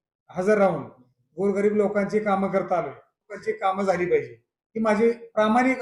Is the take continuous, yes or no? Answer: no